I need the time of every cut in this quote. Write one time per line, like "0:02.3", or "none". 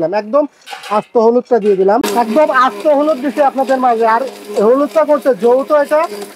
0:02.1